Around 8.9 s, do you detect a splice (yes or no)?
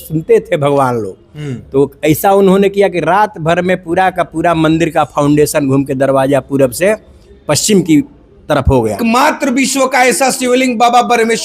yes